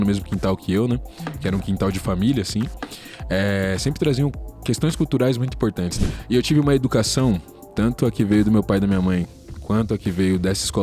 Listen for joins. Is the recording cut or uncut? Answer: cut